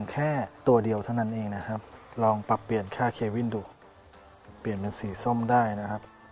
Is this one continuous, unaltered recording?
yes; 0 cuts

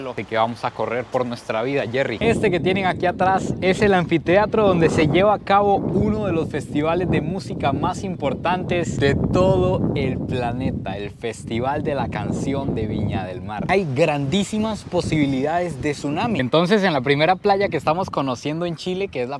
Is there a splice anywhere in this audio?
yes; 2 cuts; at 2.1 s, 13.7 s

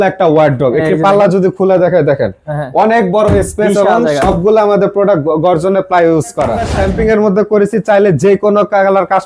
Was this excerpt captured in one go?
no; 1 cut; at 6.7 s

